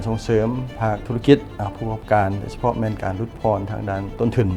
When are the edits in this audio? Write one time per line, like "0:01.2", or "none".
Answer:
none